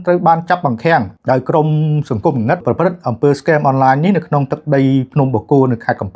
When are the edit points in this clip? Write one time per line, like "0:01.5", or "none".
0:01.1
0:02.6